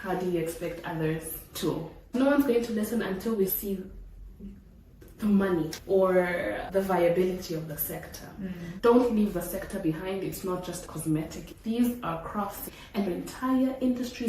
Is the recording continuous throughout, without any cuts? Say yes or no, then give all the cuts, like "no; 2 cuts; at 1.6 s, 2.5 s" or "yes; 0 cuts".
no; 2 cuts; at 2.1 s, 8.6 s